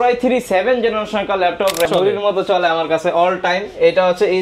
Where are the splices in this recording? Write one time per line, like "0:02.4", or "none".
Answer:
0:01.9